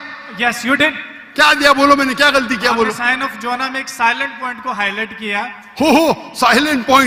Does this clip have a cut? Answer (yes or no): no